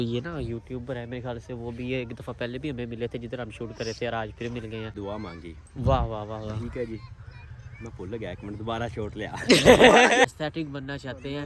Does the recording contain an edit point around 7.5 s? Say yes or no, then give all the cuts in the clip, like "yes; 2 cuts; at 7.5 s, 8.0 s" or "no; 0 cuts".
no; 2 cuts; at 5.0 s, 10.3 s